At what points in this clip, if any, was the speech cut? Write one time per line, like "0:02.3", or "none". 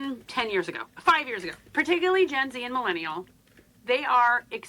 0:01.6